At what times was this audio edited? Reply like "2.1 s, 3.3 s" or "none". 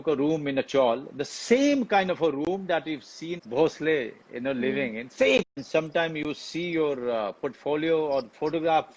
3.4 s, 5.6 s